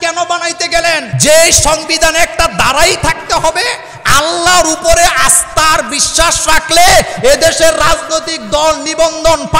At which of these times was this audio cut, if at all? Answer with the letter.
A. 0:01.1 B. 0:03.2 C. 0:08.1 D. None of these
A